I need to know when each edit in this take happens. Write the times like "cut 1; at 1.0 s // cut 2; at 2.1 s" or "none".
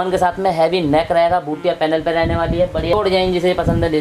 cut 1; at 2.9 s